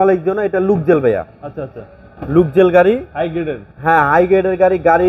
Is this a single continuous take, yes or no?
yes